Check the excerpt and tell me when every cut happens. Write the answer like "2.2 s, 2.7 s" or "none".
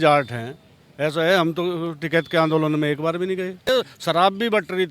3.7 s